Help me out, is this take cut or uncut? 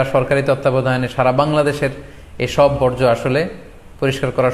uncut